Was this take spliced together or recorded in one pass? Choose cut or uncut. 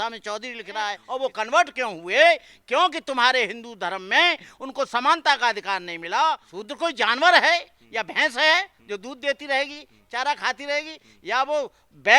cut